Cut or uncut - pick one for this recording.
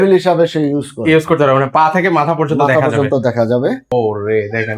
cut